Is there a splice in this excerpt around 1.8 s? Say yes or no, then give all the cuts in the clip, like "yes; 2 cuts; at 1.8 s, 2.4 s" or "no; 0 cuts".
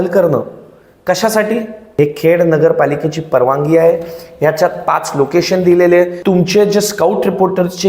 yes; 2 cuts; at 1.8 s, 6.2 s